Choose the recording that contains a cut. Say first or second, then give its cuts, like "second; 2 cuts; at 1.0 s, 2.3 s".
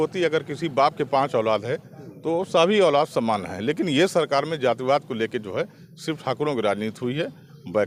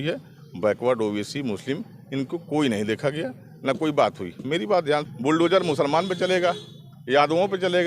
second; 1 cut; at 5.1 s